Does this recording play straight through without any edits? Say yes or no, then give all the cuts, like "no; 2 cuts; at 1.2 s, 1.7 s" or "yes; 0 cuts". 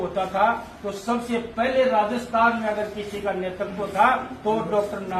yes; 0 cuts